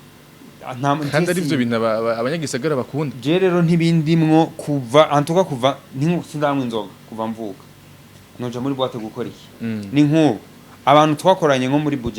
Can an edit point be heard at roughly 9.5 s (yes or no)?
yes